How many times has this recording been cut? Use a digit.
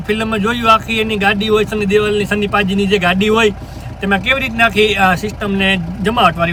0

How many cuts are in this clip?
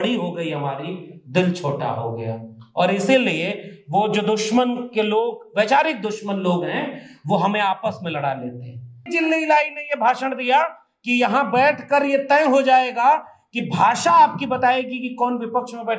1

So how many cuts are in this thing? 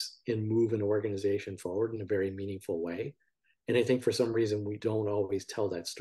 1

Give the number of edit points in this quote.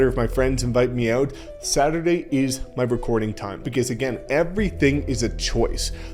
1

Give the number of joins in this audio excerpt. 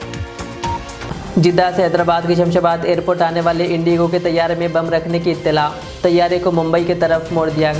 1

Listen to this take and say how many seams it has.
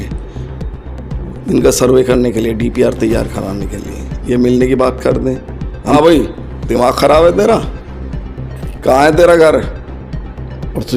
1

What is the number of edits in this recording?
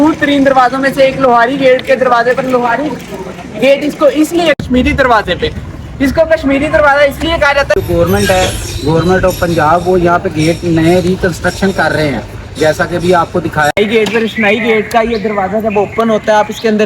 3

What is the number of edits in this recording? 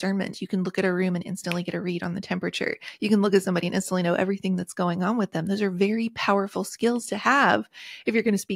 0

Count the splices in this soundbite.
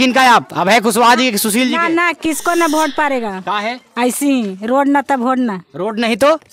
0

